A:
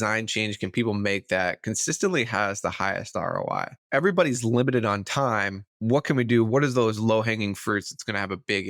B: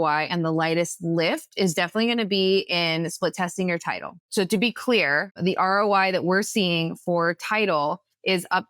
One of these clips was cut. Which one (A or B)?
B